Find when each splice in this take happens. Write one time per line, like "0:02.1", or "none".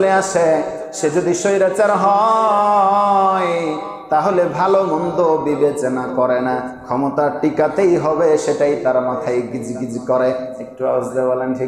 none